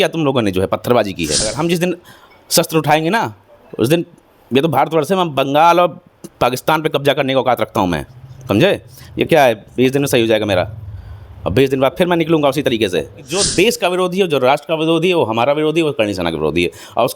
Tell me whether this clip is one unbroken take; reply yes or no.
no